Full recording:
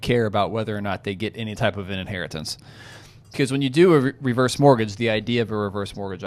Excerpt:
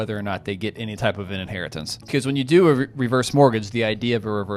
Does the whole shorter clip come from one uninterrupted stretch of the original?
no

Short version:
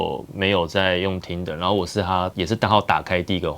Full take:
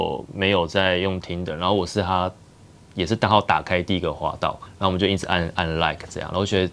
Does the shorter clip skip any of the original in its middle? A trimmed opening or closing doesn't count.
yes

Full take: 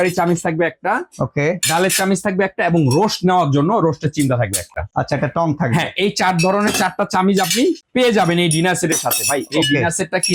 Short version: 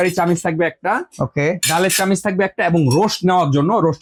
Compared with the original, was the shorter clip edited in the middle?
no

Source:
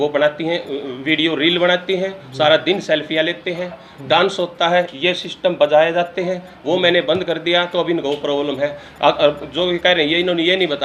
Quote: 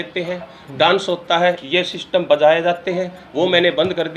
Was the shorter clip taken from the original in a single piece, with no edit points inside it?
yes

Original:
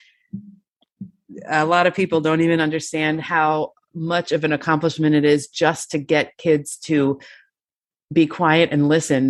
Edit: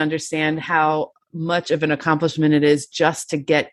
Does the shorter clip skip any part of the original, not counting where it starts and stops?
no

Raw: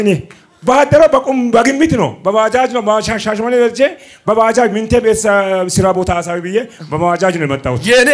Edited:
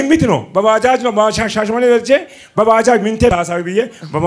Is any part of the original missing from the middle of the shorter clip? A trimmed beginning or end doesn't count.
yes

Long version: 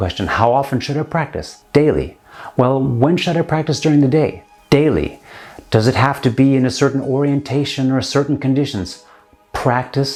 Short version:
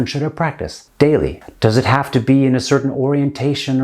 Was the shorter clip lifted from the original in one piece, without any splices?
no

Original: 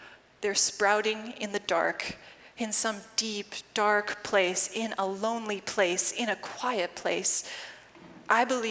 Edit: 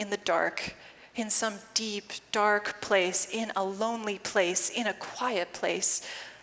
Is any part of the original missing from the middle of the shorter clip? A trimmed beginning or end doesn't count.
no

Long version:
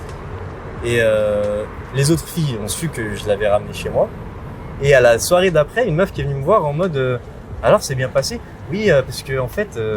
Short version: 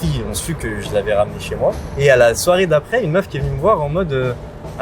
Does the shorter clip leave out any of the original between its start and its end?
yes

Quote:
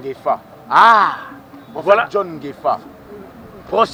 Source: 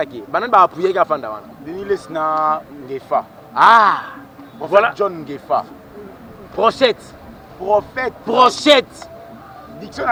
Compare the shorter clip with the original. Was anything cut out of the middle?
no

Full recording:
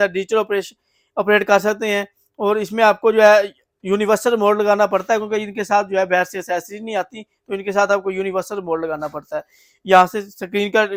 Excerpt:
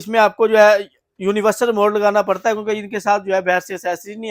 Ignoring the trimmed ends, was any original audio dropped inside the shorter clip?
no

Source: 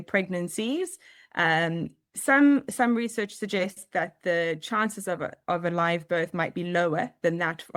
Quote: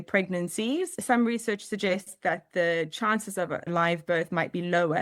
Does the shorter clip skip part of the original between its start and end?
yes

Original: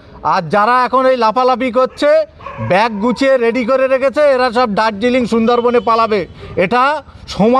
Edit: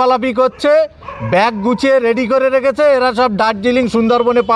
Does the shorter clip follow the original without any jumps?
yes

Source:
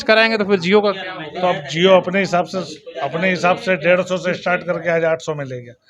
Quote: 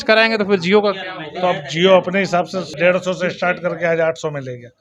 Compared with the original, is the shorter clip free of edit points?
no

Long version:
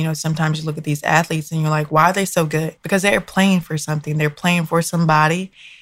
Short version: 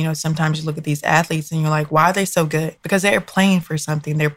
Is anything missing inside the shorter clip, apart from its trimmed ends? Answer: no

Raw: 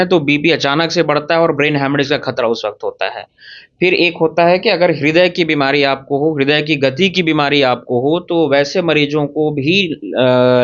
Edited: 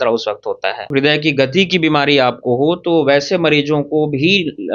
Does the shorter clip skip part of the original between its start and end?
yes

